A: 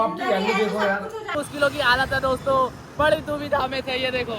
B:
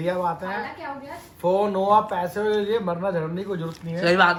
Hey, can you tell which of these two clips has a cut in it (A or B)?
A